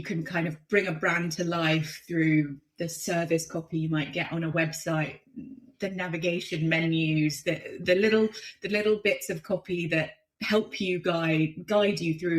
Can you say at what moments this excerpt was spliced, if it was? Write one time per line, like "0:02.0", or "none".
none